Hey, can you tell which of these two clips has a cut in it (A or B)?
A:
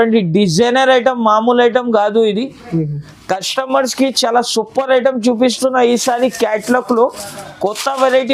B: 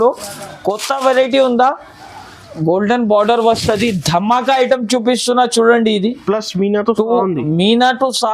B